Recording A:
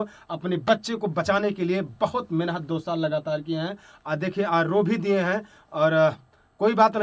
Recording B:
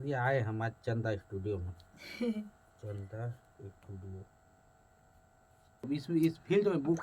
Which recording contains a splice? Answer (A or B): B